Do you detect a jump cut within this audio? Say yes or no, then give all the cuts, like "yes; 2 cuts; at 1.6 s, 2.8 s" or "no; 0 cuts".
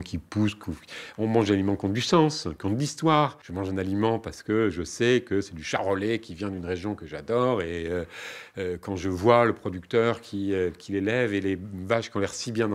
yes; 1 cut; at 3.5 s